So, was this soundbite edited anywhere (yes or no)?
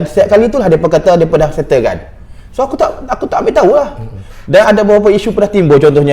no